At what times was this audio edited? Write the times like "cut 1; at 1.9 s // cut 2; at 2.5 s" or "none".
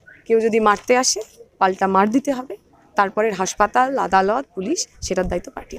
none